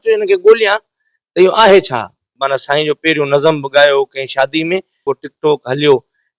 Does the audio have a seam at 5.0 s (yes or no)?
yes